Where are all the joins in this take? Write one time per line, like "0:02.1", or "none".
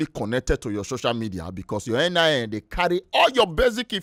none